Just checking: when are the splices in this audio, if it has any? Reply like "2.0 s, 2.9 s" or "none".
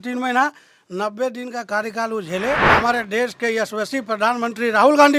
2.7 s